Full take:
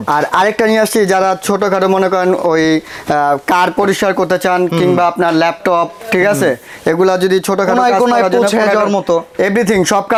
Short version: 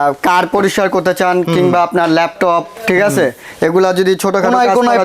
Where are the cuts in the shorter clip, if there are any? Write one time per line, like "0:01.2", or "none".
none